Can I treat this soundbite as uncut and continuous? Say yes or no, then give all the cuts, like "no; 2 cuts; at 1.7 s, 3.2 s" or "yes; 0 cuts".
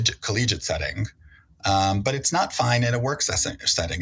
yes; 0 cuts